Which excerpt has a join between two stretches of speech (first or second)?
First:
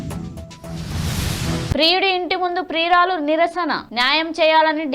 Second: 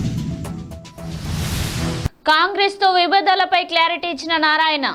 first